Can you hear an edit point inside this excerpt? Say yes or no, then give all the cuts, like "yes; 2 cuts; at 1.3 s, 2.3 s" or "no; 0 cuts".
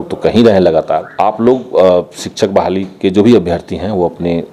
yes; 1 cut; at 1.1 s